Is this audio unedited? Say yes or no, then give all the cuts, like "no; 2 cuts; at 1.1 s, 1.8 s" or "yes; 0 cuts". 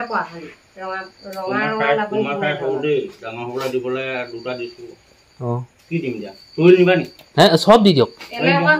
yes; 0 cuts